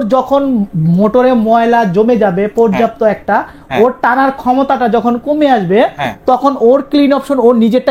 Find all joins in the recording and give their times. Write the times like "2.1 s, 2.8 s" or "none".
none